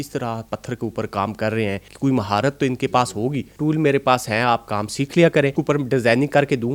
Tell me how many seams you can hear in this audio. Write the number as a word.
three